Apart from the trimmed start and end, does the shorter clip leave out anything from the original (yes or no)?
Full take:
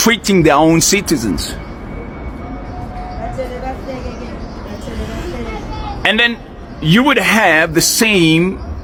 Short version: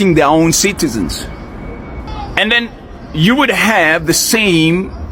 yes